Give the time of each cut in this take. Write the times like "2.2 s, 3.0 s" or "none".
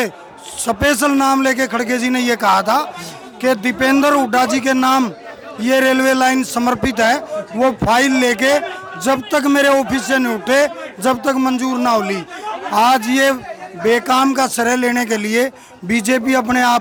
none